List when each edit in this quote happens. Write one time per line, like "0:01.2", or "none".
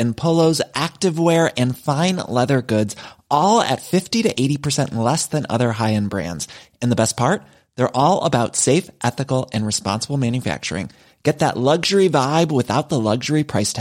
none